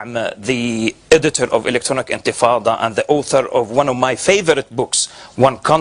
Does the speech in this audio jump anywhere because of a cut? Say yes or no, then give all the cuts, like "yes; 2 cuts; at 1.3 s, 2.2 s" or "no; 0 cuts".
yes; 1 cut; at 1.8 s